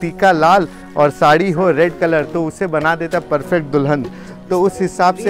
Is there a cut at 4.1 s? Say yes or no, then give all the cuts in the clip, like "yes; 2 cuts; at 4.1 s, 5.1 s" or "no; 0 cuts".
no; 0 cuts